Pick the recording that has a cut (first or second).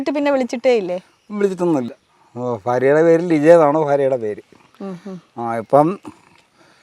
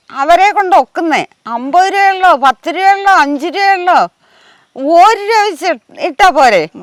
first